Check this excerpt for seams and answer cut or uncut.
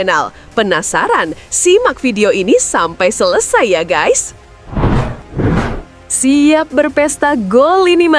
cut